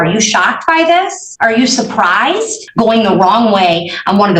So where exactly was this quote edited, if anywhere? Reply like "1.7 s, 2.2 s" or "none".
1.2 s, 2.6 s

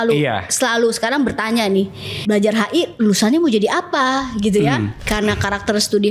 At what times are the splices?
2.0 s, 5.0 s

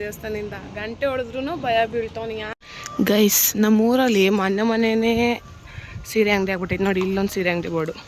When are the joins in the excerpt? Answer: 2.5 s

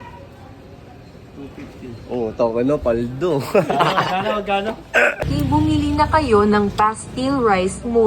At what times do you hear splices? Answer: 5.1 s

